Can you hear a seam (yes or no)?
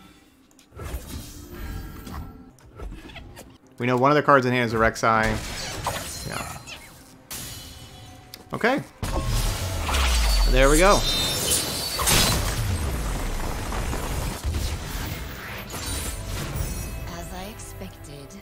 yes